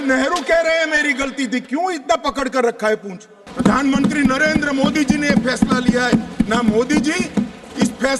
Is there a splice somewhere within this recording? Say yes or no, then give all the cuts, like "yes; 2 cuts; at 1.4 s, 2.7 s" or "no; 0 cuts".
yes; 1 cut; at 3.4 s